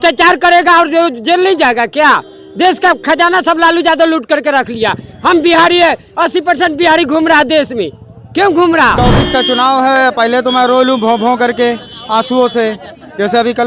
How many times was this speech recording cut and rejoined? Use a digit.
1